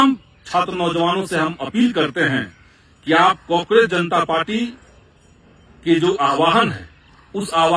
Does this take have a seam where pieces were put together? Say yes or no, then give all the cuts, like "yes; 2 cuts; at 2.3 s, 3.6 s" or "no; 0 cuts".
no; 0 cuts